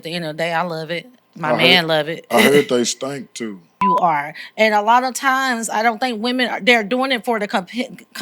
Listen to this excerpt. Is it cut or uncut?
cut